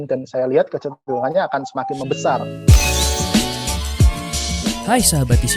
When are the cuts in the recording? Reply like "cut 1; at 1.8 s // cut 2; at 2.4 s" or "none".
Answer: cut 1; at 2.5 s